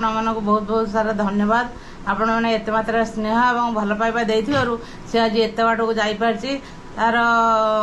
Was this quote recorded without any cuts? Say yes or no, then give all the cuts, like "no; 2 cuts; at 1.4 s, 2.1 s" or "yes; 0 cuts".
yes; 0 cuts